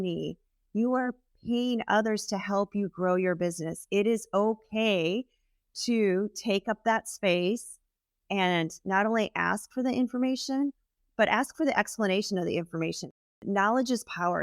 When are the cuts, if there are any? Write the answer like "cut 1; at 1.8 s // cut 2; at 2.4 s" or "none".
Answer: cut 1; at 13.2 s